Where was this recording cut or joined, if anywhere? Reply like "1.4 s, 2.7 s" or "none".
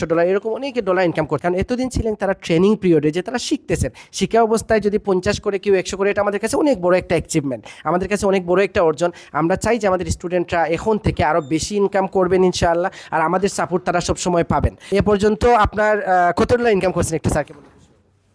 1.3 s, 14.9 s